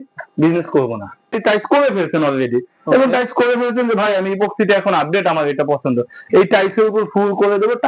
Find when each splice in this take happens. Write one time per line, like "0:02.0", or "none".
0:01.4